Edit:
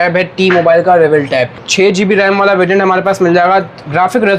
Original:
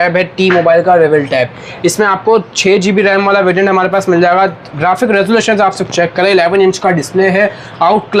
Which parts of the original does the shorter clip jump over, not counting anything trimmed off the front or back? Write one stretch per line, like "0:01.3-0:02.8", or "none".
0:01.7-0:02.5